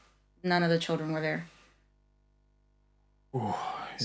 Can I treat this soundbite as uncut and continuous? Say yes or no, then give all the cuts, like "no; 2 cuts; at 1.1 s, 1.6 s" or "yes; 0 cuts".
yes; 0 cuts